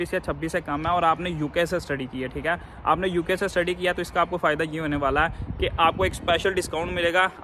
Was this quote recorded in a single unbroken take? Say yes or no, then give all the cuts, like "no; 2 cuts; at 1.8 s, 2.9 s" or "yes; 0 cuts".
yes; 0 cuts